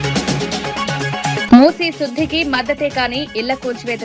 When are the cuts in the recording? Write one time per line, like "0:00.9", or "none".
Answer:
0:01.4